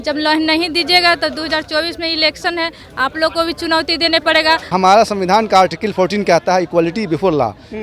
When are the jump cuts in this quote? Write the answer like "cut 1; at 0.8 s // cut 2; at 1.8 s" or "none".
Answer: cut 1; at 4.7 s

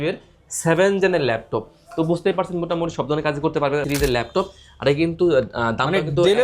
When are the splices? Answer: cut 1; at 3.8 s

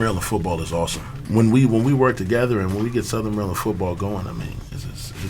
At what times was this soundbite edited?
cut 1; at 1.2 s

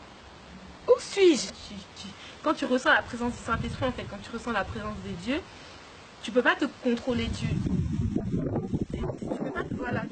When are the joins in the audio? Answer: cut 1; at 1.5 s

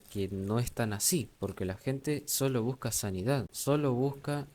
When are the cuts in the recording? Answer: cut 1; at 3.5 s

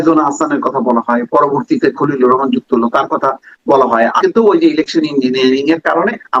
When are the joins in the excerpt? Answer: cut 1; at 4.2 s

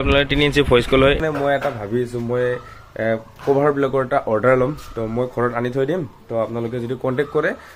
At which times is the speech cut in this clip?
cut 1; at 1.2 s

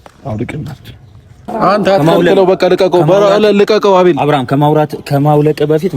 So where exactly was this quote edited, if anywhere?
cut 1; at 1.5 s

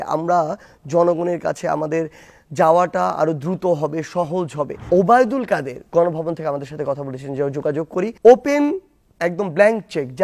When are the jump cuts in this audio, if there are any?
cut 1; at 4.8 s // cut 2; at 8.1 s

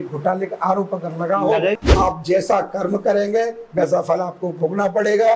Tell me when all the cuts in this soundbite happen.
cut 1; at 1.8 s

